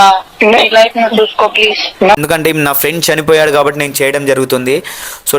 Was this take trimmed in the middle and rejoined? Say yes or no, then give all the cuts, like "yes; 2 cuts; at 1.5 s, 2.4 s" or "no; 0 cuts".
yes; 1 cut; at 2.2 s